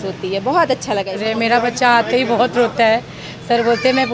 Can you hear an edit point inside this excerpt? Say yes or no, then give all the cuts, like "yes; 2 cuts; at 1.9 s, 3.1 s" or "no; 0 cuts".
yes; 1 cut; at 1.2 s